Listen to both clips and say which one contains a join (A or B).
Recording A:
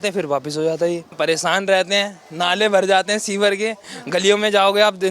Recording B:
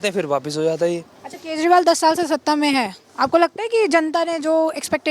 A